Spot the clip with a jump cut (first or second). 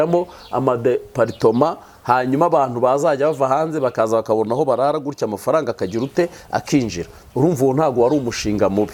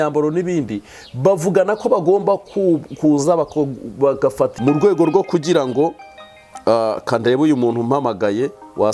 second